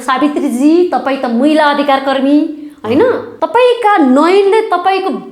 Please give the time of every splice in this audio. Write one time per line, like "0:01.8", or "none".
0:03.3